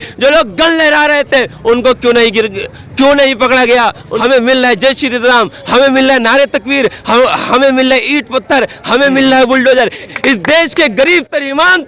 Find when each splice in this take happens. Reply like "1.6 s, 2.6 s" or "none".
4.1 s, 10.1 s